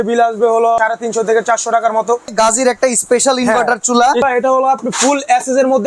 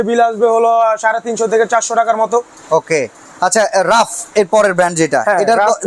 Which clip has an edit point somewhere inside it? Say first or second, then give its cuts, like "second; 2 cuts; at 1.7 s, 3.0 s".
first; 3 cuts; at 0.8 s, 2.3 s, 4.2 s